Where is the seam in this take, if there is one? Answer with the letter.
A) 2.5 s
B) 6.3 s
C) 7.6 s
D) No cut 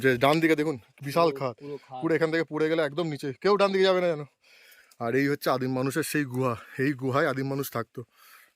D